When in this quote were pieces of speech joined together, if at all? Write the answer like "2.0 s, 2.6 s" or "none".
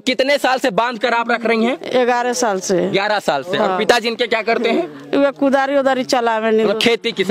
none